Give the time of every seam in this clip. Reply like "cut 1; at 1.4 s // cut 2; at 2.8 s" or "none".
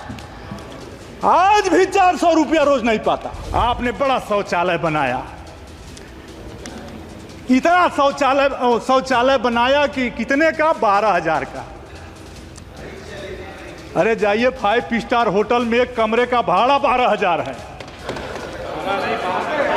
cut 1; at 3.4 s